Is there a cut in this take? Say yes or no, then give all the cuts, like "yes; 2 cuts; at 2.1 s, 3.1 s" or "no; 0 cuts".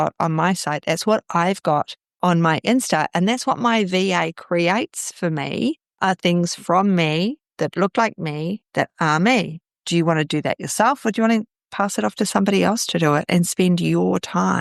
no; 0 cuts